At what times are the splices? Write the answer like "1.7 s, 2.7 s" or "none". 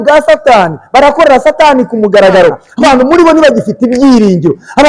2.7 s